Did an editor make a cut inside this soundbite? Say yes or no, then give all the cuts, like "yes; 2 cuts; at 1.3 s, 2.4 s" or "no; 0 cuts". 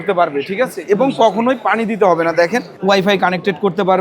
yes; 1 cut; at 2.7 s